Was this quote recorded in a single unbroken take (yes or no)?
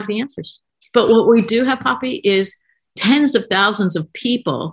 yes